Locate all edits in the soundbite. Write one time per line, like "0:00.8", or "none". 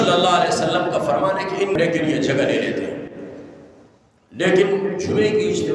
0:01.7